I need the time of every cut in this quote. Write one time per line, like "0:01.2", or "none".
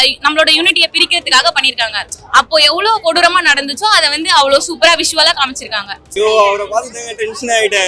0:06.2